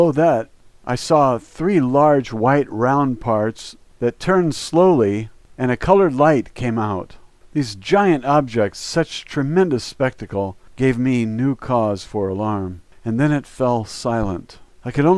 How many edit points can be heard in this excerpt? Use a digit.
1